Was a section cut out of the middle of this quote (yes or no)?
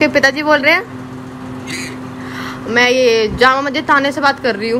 no